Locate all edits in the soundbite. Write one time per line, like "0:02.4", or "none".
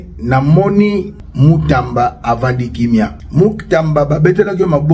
0:01.2
0:03.2